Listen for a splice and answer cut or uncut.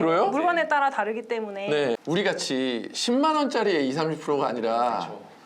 cut